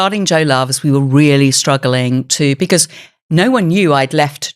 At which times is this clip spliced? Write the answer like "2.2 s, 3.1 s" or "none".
none